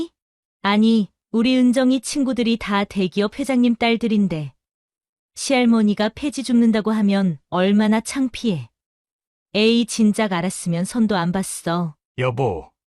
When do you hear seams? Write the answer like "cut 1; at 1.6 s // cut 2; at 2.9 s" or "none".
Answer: cut 1; at 12.0 s